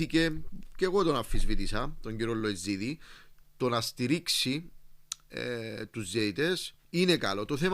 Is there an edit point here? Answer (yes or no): yes